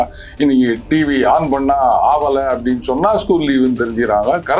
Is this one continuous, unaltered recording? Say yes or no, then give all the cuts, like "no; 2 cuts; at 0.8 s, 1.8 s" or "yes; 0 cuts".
yes; 0 cuts